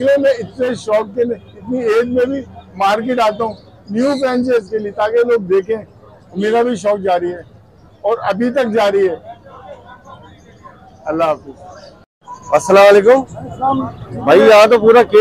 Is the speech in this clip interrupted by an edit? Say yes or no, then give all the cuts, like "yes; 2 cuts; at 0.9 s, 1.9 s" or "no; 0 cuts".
no; 0 cuts